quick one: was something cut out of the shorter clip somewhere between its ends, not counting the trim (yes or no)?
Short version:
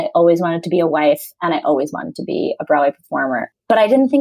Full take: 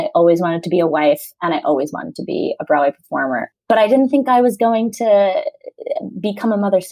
no